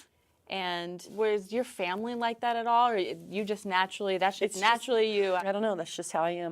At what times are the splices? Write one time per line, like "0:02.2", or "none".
0:01.1
0:05.4